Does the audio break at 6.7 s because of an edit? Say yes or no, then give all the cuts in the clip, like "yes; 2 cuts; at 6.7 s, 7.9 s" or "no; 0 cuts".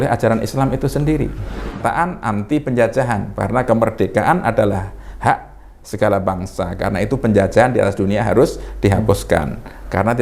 no; 1 cut; at 1.8 s